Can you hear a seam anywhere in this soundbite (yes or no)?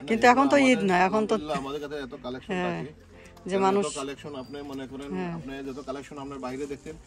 no